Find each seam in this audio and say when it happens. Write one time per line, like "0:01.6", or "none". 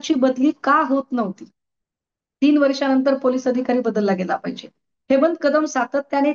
none